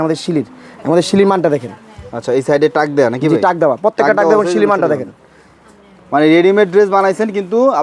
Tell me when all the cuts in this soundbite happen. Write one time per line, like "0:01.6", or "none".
none